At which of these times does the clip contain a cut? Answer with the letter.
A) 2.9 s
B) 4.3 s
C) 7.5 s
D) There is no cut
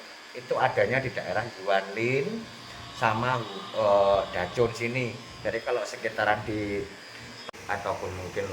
C